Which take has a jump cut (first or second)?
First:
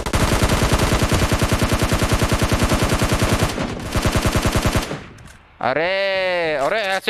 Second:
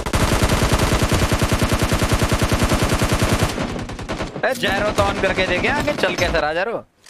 first